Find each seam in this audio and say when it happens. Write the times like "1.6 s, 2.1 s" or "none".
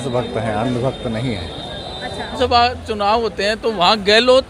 2.3 s